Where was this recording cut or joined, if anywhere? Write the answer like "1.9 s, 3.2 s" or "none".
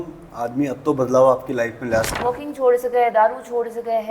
2.1 s